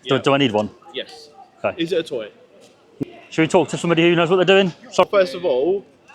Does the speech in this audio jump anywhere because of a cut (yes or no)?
yes